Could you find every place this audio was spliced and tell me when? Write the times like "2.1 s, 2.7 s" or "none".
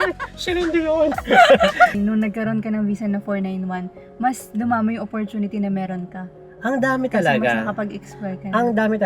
1.9 s